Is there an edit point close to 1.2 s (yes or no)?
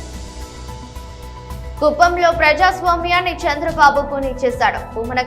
yes